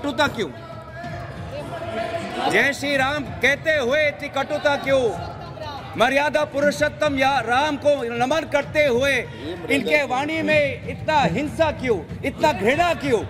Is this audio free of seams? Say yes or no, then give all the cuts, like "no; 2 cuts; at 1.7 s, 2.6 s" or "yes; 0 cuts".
yes; 0 cuts